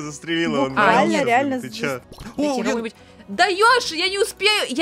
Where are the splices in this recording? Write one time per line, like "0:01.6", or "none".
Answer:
0:02.2